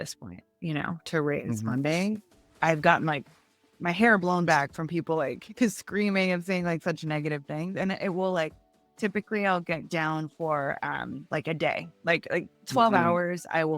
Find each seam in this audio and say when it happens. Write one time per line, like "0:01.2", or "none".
0:02.5